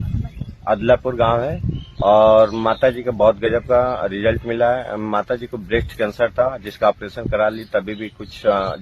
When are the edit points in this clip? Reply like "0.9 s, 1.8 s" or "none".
none